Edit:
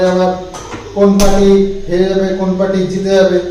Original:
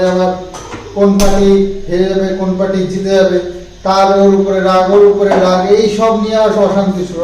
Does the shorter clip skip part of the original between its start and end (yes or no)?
no